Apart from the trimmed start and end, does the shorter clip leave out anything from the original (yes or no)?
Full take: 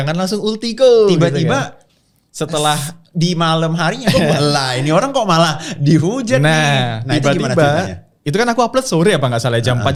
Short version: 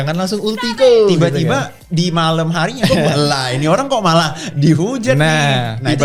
yes